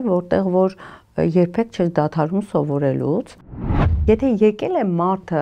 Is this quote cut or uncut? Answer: cut